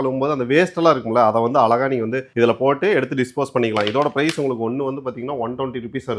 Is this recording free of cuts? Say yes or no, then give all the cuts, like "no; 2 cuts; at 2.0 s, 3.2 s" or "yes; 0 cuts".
yes; 0 cuts